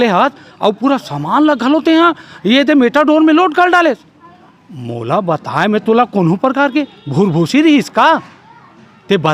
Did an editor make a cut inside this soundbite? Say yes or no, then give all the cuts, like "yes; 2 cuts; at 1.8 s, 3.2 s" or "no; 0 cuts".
no; 0 cuts